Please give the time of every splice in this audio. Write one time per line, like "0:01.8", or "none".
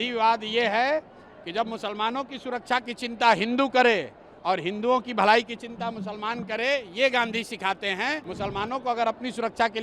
0:08.3

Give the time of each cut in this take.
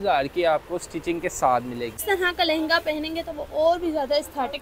0:02.0

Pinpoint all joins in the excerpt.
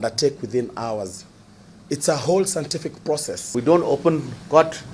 0:03.4

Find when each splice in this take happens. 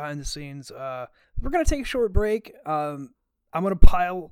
0:01.2

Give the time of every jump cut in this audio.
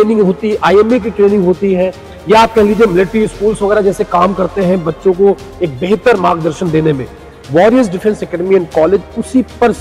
none

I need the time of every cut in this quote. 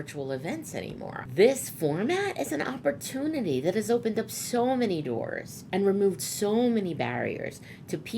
0:01.2

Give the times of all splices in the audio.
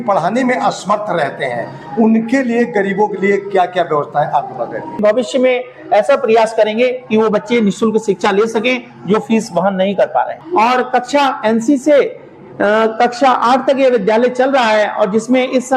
0:05.1
0:10.4

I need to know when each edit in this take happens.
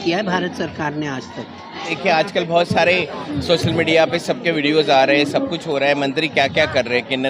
0:02.0

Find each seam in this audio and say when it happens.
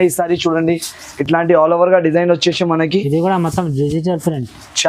none

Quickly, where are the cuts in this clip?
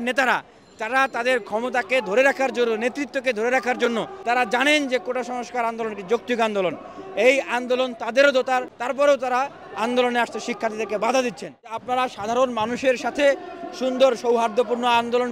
0:04.1
0:08.8
0:11.8

